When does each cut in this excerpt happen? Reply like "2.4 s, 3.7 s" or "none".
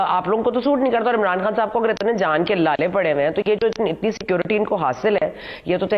none